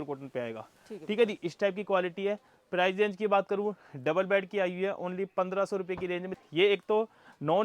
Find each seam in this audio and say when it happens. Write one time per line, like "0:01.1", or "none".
0:06.3